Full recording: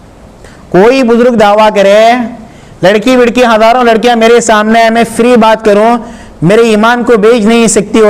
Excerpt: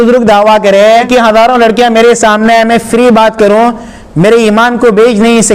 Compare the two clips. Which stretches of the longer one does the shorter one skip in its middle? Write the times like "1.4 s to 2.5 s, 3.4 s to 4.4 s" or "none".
2.2 s to 3.3 s